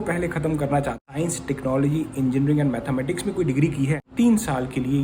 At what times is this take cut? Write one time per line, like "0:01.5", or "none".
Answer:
0:01.0
0:04.0